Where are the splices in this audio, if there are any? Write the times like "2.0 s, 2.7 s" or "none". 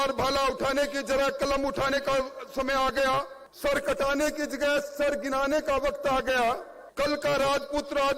3.4 s, 6.8 s